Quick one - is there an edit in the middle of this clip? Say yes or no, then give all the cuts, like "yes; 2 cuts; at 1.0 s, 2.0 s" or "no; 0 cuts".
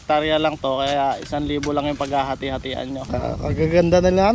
yes; 1 cut; at 3.0 s